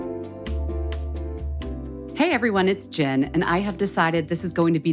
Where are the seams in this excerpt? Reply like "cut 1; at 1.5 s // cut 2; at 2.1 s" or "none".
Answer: cut 1; at 1.6 s